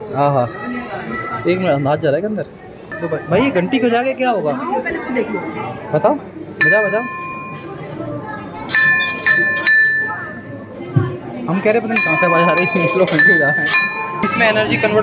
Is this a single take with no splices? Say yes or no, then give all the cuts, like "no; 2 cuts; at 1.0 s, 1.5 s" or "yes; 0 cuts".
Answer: no; 2 cuts; at 2.9 s, 14.2 s